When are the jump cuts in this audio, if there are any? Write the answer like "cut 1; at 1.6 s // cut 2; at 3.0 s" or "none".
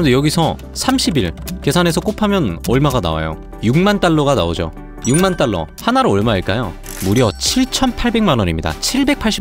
none